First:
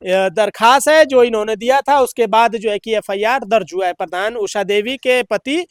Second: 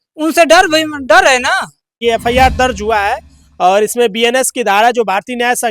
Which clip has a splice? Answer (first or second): second